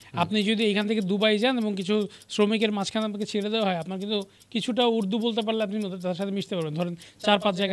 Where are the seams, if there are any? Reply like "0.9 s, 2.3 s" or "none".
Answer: none